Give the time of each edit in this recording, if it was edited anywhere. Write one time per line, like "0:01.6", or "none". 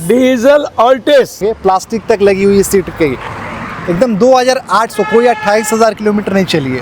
0:01.4